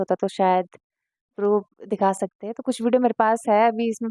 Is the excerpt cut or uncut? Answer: uncut